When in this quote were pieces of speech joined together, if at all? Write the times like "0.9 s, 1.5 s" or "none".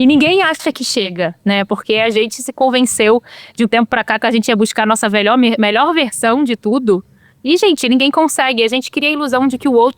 1.1 s